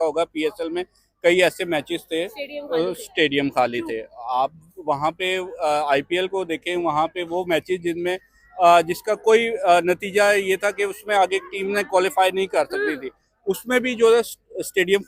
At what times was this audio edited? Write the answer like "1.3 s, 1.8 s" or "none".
none